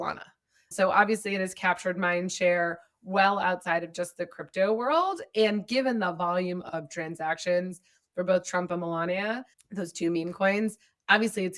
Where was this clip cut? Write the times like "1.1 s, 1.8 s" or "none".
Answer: none